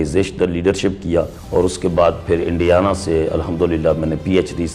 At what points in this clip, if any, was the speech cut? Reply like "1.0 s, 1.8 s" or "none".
1.4 s